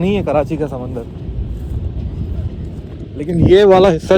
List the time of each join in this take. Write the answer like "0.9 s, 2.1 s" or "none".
none